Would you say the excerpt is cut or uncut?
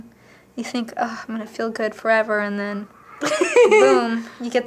uncut